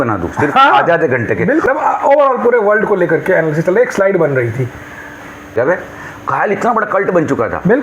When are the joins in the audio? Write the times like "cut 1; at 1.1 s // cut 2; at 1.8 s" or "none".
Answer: cut 1; at 1.6 s // cut 2; at 5.5 s